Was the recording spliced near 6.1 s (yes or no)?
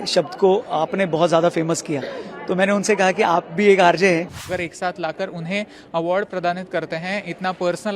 no